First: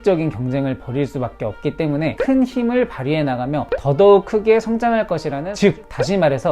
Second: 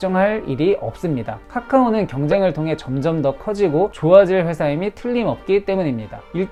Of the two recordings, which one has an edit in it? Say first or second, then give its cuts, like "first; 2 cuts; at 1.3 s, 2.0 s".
first; 1 cut; at 5.5 s